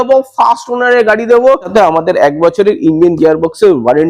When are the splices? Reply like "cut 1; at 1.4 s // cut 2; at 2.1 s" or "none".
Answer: cut 1; at 1.7 s